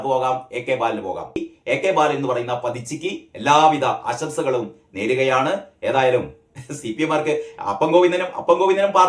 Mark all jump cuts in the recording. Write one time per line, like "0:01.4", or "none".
0:01.4